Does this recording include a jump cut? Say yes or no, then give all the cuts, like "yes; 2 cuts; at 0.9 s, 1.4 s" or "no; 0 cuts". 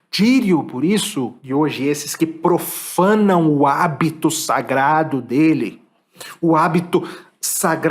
yes; 1 cut; at 1.4 s